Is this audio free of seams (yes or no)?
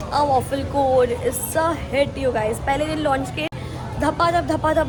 yes